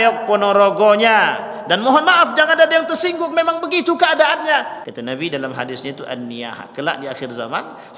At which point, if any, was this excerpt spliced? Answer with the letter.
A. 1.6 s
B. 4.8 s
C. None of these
B